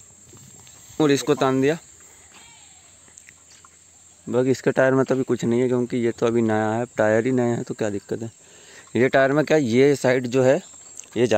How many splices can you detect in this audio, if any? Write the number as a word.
zero